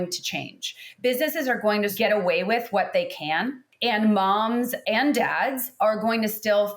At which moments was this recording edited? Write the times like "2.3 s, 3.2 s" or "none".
1.9 s, 3.6 s, 4.8 s